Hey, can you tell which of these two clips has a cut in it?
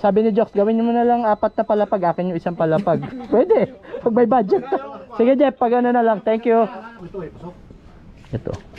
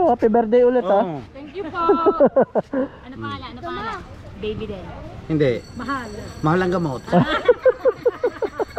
first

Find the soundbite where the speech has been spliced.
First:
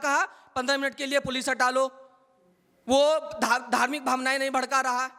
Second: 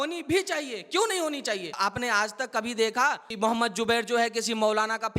second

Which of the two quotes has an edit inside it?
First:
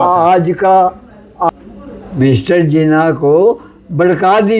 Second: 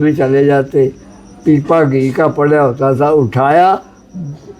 first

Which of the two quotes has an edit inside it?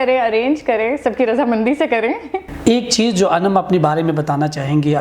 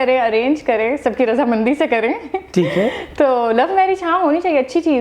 first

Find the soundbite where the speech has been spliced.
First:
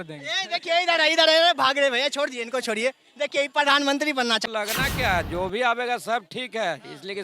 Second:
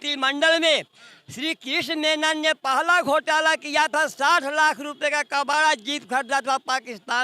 first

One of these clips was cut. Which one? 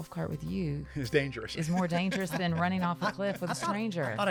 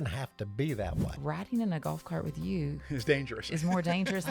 second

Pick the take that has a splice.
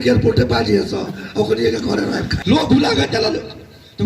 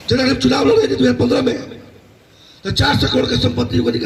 first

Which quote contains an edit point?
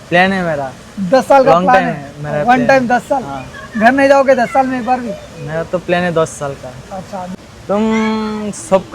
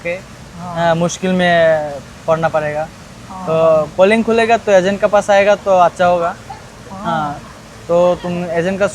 first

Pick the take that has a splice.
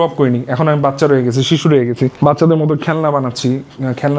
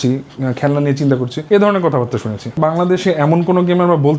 second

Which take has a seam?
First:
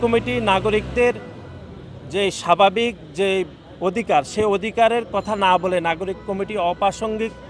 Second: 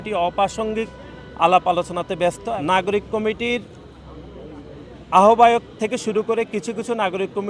second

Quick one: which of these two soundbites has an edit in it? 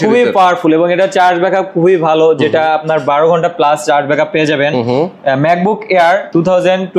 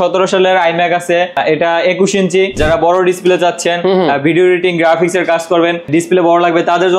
second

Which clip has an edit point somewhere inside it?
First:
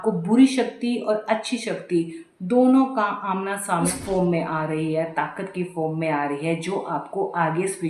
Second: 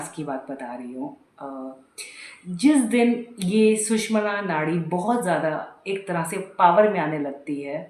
first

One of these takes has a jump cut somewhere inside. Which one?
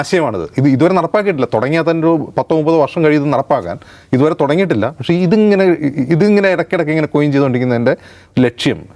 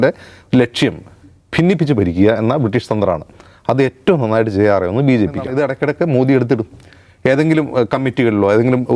second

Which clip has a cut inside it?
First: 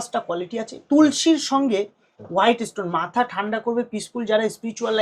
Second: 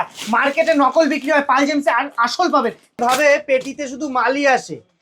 second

